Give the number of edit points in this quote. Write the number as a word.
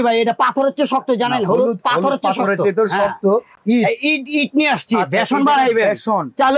zero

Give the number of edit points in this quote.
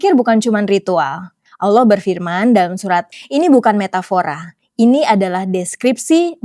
one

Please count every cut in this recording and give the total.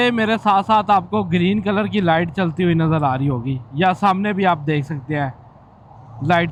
zero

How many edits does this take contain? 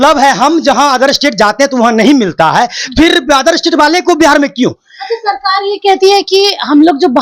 zero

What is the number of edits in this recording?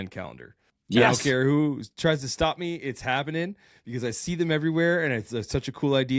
one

